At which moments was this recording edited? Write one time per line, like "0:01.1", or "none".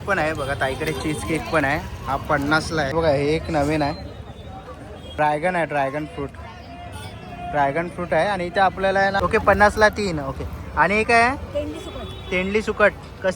0:02.9
0:09.2